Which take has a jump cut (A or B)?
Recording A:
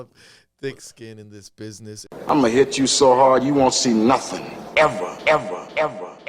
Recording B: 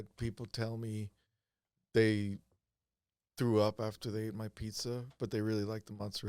A